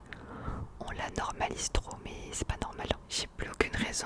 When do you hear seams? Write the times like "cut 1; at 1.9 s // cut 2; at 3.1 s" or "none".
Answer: cut 1; at 3.0 s